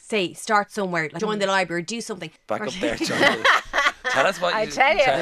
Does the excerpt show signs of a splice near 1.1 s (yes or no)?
yes